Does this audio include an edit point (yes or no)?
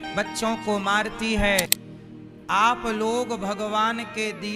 yes